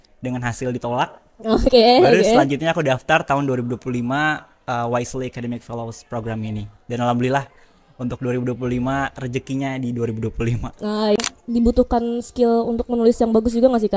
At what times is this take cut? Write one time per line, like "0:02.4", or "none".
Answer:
0:11.2